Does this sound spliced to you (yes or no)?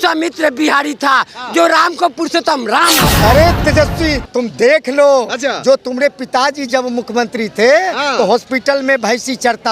yes